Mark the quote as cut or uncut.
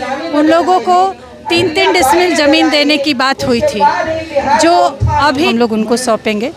cut